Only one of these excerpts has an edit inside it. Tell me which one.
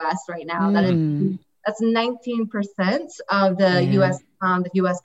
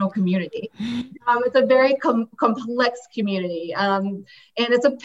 second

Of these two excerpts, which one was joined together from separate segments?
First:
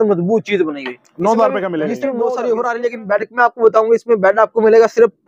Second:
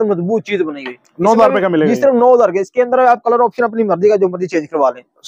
first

